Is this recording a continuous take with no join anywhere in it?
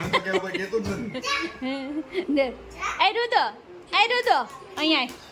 yes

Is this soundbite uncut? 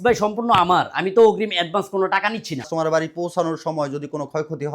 no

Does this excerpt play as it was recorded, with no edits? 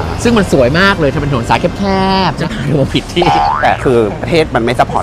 no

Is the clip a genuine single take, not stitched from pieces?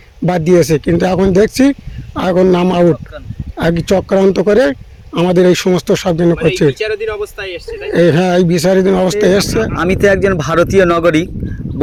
yes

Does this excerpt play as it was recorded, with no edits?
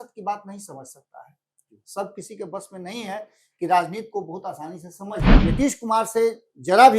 no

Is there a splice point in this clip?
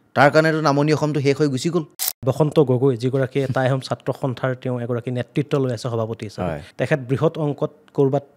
yes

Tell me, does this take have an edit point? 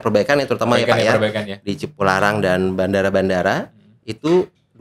no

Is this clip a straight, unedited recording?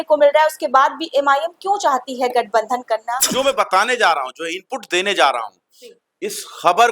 no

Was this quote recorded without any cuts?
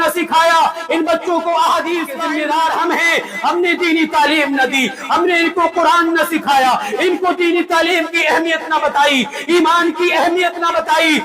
no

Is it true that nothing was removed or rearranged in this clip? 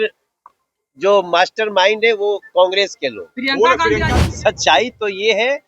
no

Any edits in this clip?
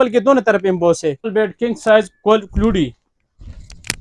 yes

